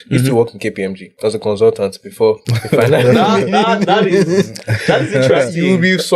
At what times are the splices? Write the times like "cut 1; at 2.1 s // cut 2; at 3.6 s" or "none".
cut 1; at 1.0 s // cut 2; at 2.5 s

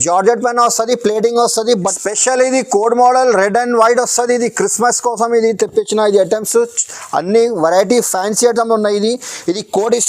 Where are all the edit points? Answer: cut 1; at 1.9 s

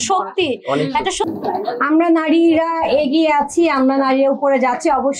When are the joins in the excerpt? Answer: cut 1; at 1.2 s

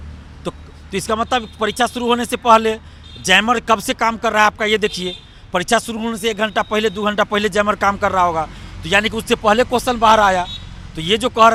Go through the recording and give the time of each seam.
none

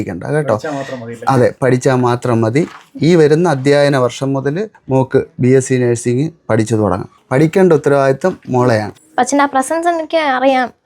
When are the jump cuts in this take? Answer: cut 1; at 4.7 s // cut 2; at 7.1 s // cut 3; at 9.0 s

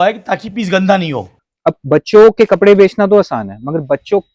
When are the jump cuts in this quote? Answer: cut 1; at 1.3 s

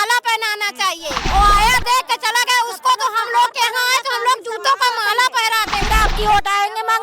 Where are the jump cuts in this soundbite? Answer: cut 1; at 1.2 s // cut 2; at 5.9 s

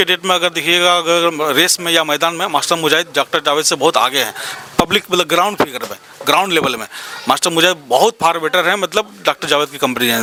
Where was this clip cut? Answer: none

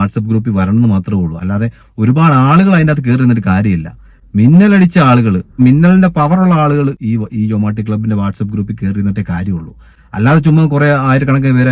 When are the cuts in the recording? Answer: cut 1; at 5.6 s

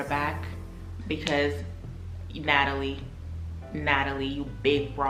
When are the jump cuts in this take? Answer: none

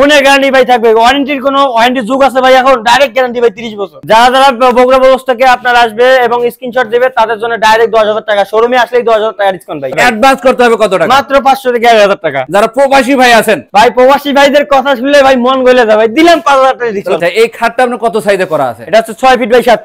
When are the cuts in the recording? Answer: cut 1; at 4.0 s // cut 2; at 9.9 s // cut 3; at 12.5 s // cut 4; at 17.2 s

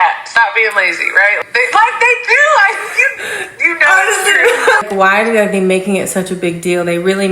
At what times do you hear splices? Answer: cut 1; at 1.4 s // cut 2; at 4.8 s

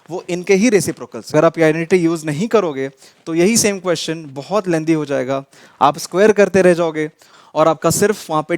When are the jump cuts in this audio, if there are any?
cut 1; at 1.3 s

